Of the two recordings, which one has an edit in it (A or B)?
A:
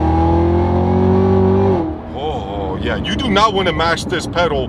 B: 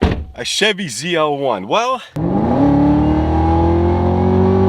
B